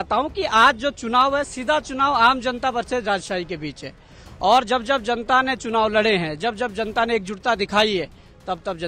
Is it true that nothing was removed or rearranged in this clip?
yes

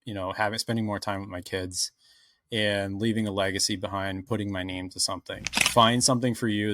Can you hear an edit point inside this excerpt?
yes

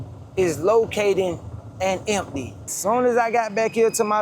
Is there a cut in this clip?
yes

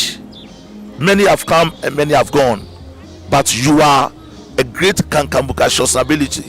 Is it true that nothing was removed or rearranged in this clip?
no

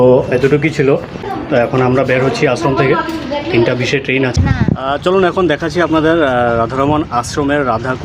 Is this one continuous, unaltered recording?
no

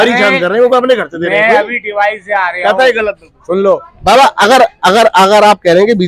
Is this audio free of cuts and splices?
yes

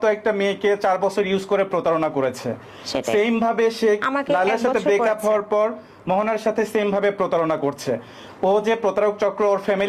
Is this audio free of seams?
yes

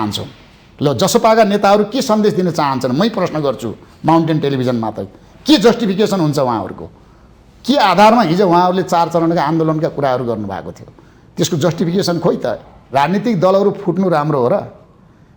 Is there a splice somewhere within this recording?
yes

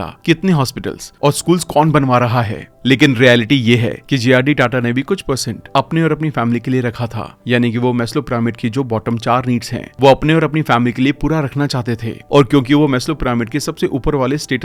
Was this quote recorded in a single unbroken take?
yes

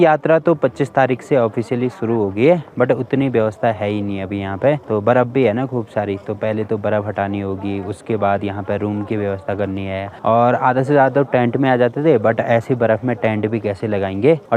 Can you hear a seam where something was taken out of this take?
no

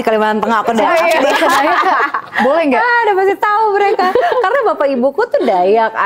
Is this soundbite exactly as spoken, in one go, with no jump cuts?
yes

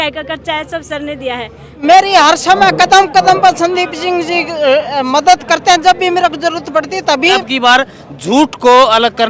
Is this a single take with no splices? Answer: no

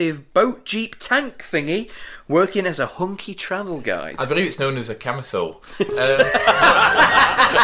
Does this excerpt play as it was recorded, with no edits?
yes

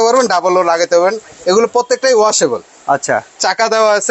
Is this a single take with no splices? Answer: yes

